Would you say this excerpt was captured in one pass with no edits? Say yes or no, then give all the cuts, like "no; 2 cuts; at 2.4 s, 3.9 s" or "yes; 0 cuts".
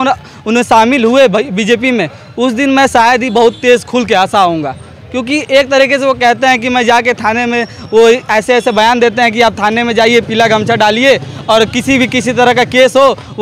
yes; 0 cuts